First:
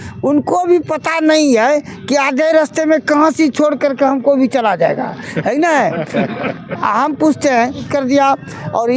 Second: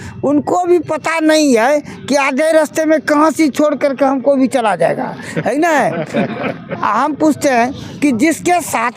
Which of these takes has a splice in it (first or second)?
first